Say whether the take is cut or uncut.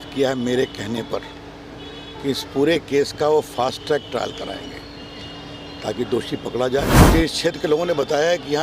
cut